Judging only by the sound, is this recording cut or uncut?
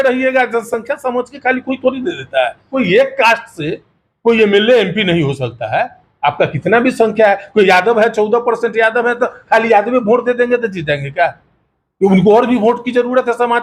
cut